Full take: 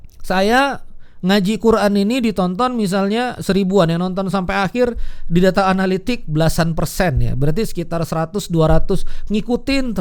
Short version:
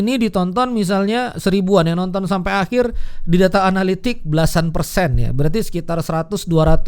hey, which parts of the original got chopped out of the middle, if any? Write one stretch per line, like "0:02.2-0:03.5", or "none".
none